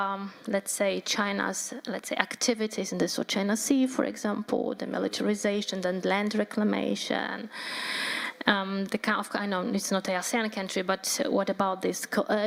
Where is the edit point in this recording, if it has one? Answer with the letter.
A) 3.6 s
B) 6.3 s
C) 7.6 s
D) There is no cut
D